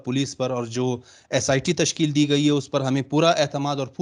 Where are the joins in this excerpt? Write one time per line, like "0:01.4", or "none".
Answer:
none